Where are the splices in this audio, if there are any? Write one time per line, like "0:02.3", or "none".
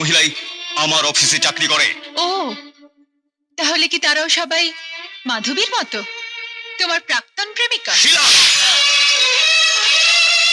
none